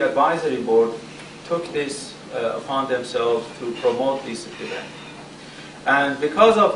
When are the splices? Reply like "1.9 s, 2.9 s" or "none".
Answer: none